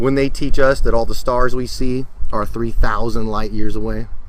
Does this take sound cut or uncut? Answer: uncut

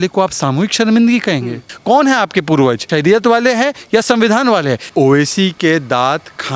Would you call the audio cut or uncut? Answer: cut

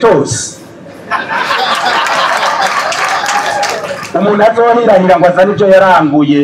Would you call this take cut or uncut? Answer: cut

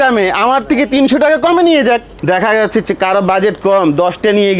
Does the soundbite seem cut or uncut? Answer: cut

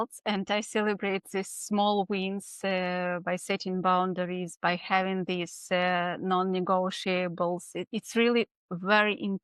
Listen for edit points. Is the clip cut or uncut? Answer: uncut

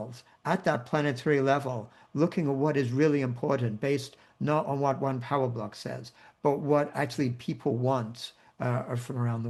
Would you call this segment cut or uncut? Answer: uncut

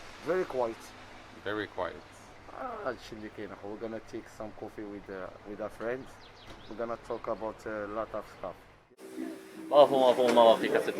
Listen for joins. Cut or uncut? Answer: uncut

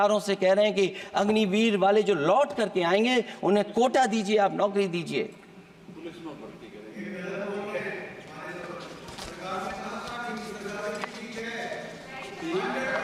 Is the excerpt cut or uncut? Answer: uncut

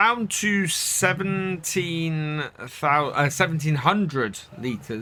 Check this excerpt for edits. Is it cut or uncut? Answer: uncut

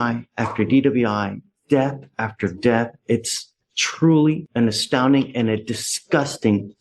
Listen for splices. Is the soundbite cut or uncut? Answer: uncut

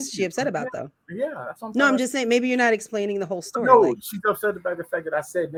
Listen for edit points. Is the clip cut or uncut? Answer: uncut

